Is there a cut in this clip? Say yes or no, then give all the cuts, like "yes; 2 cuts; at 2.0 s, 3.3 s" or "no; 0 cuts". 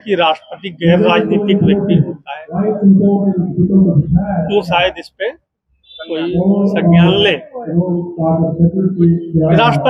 no; 0 cuts